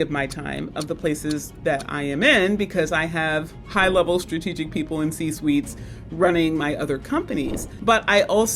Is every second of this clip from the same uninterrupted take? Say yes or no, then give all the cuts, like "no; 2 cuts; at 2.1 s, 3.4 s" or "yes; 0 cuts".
no; 1 cut; at 7.6 s